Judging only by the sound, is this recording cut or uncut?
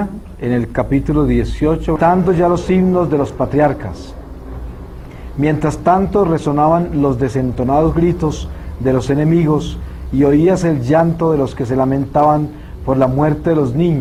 uncut